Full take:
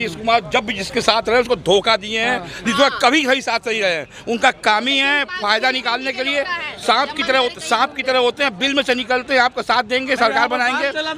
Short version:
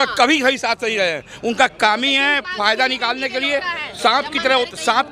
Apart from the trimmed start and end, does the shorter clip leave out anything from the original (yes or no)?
no